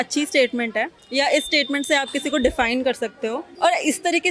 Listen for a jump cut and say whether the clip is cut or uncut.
cut